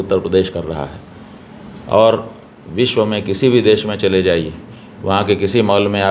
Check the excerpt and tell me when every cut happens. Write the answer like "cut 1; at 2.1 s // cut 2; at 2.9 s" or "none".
none